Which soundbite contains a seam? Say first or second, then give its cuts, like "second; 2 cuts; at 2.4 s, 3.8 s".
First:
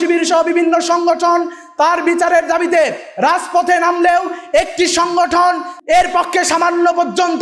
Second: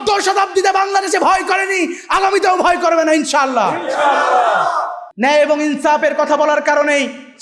second; 1 cut; at 5.0 s